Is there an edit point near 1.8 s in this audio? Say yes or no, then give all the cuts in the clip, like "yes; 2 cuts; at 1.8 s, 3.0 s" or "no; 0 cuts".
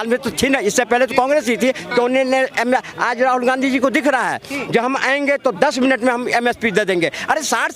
no; 0 cuts